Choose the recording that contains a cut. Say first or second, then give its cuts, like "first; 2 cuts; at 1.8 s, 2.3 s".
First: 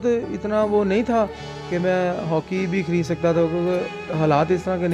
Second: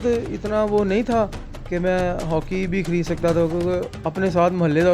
second; 1 cut; at 3.9 s